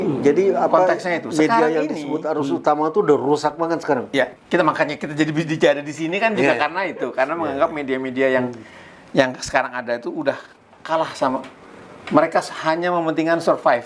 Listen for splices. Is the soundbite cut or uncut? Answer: cut